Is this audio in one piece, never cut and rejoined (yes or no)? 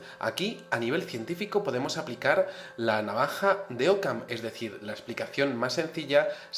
yes